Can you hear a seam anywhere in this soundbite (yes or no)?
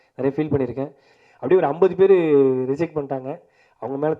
yes